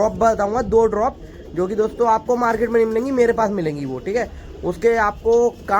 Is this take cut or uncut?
uncut